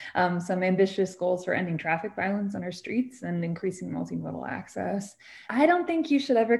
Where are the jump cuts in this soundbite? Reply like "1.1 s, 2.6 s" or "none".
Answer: 5.4 s